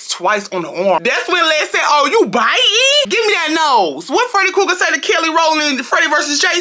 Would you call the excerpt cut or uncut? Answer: cut